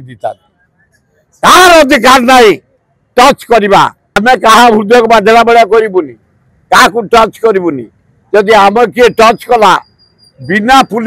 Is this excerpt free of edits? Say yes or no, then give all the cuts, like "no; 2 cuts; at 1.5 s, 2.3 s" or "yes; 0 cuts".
no; 1 cut; at 4.1 s